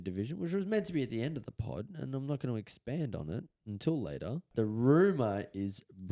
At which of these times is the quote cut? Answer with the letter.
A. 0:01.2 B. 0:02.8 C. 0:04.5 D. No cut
C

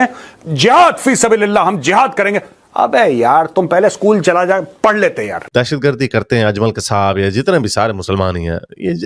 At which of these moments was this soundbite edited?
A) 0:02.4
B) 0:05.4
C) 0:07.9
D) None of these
B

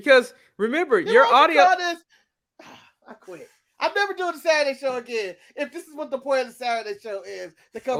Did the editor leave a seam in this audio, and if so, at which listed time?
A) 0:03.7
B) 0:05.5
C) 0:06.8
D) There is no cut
D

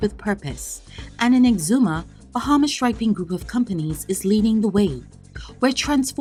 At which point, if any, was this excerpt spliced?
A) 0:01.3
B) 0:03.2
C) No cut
C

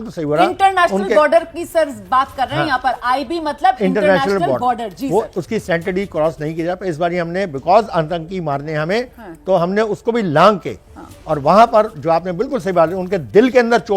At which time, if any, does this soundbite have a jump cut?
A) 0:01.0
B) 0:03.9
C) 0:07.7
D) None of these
A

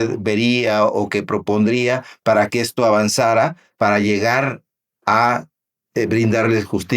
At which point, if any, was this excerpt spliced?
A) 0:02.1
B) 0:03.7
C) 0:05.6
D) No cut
B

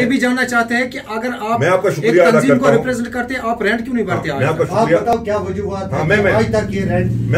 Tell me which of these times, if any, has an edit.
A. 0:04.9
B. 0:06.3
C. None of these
C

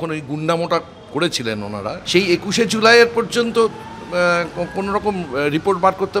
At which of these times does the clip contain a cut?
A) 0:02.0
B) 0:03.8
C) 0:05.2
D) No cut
A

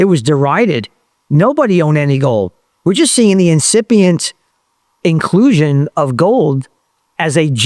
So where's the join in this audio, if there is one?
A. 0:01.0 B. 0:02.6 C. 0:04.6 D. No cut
D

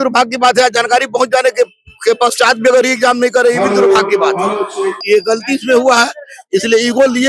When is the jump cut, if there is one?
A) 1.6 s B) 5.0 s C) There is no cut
B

